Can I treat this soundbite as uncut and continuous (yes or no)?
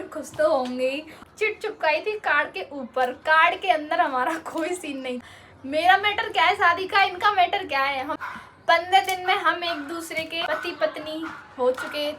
no